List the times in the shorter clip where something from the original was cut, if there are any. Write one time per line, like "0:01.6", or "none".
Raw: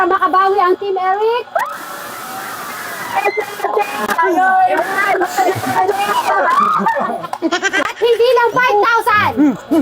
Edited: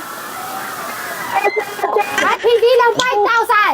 0:02.2